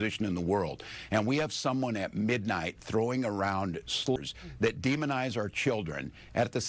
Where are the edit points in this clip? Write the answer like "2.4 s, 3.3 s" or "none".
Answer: 4.2 s